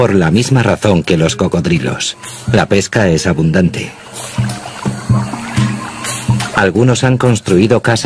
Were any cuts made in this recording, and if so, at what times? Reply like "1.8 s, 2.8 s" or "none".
none